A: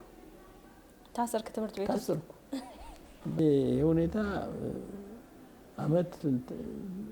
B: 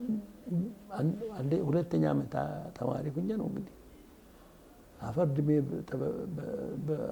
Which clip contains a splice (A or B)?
A